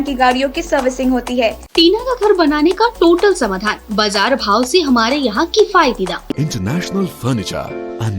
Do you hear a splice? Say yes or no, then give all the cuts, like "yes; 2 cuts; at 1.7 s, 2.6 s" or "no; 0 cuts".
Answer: yes; 2 cuts; at 1.6 s, 6.3 s